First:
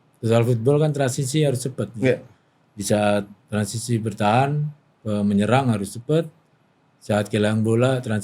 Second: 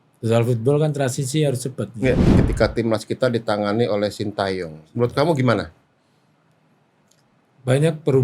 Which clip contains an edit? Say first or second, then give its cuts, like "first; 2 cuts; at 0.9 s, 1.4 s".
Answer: second; 1 cut; at 2.3 s